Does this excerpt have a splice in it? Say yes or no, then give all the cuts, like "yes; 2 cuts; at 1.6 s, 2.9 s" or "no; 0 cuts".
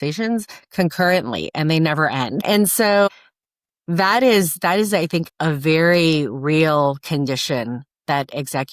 no; 0 cuts